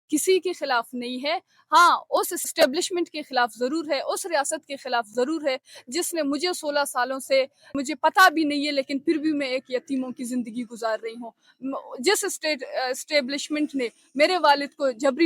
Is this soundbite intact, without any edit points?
no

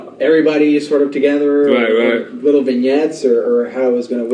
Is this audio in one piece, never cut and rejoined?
yes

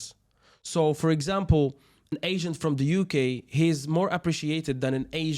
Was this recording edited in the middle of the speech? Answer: yes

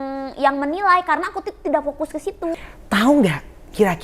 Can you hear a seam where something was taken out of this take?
yes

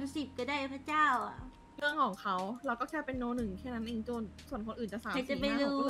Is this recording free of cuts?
yes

